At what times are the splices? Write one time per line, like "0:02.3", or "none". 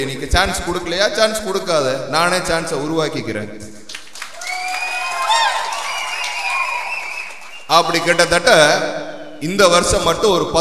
none